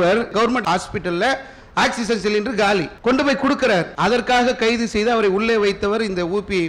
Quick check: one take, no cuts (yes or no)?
no